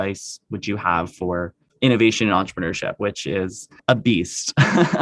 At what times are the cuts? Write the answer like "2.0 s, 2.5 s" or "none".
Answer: 1.6 s, 3.8 s